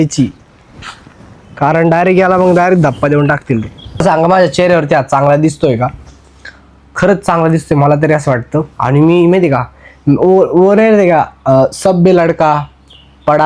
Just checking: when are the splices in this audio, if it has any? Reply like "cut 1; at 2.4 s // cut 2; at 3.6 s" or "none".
cut 1; at 4.0 s